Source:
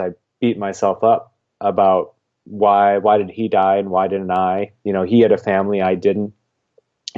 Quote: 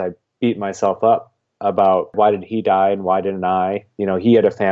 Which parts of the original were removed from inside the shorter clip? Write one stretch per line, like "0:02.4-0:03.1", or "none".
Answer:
0:02.1-0:03.0